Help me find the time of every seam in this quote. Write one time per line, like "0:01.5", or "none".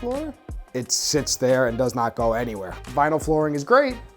0:02.8